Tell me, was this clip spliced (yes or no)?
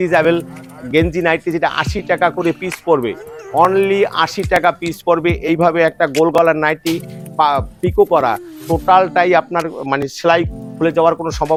no